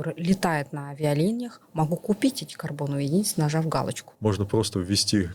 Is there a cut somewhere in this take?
yes; 1 cut; at 4.0 s

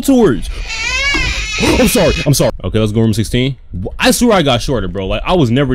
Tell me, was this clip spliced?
yes; 1 cut; at 2.6 s

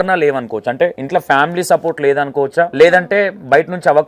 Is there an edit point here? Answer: yes; 2 cuts; at 1.0 s, 2.7 s

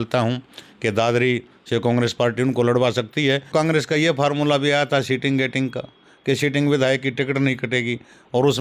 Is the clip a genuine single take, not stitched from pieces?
no; 1 cut; at 3.5 s

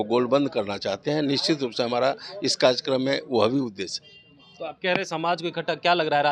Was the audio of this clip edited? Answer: no; 0 cuts

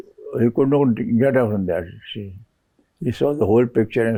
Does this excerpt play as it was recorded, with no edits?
yes; 0 cuts

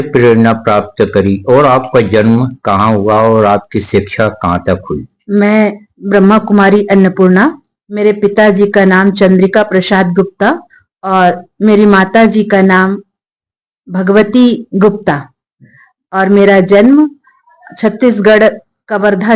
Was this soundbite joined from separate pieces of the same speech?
yes; 1 cut; at 5.1 s

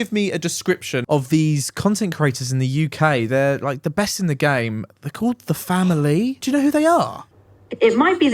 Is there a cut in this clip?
yes; 2 cuts; at 0.9 s, 6.4 s

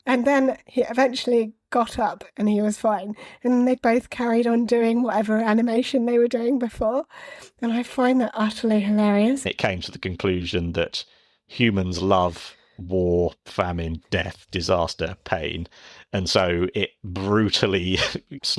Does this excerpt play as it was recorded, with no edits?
no; 1 cut; at 9.4 s

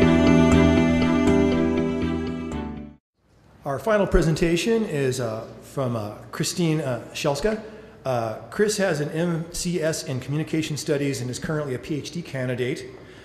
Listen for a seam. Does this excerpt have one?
no; 0 cuts

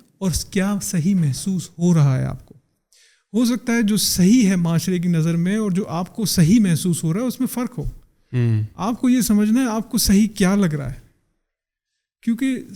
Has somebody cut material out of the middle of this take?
no; 0 cuts

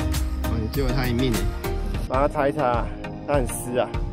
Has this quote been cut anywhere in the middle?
yes; 1 cut; at 2.0 s

